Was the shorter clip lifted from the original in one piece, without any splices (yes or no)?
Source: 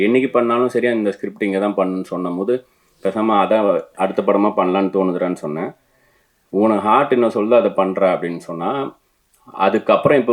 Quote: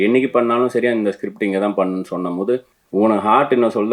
no